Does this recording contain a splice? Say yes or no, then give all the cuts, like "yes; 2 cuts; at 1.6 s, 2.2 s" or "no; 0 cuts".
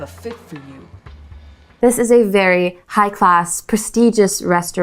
yes; 1 cut; at 1.6 s